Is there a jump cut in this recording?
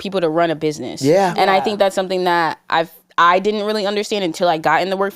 no; 0 cuts

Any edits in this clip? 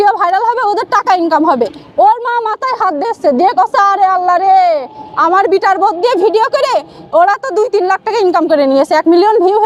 no; 0 cuts

